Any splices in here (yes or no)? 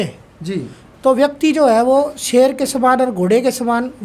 no